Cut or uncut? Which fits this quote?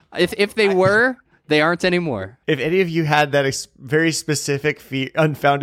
cut